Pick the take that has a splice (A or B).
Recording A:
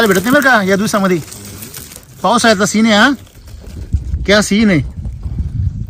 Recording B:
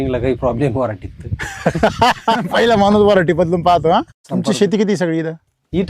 B